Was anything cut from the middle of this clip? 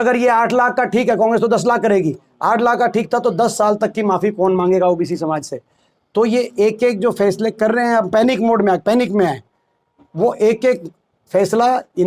no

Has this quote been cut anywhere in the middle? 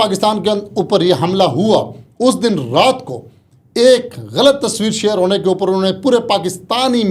no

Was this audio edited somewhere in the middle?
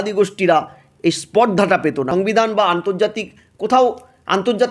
yes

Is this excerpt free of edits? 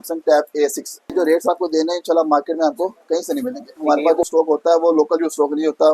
no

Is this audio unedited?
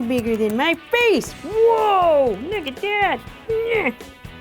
no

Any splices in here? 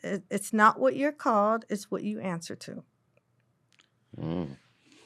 no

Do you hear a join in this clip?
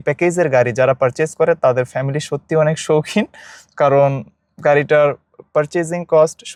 no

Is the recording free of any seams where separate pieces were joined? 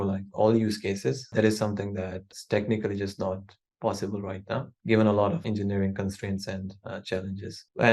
no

